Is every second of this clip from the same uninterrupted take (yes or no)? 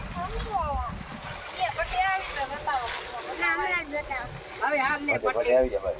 yes